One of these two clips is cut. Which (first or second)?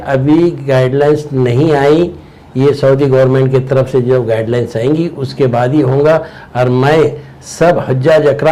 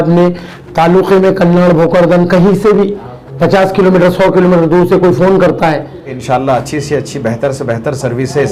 second